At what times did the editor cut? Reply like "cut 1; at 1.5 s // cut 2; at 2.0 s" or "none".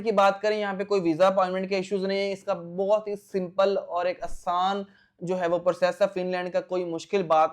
none